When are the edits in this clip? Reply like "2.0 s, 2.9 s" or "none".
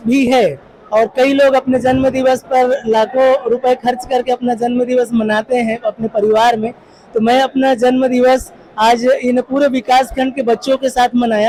none